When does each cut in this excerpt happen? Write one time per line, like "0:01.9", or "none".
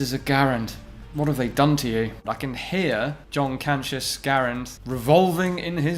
0:02.2